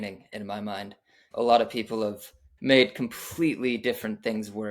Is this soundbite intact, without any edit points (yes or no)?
no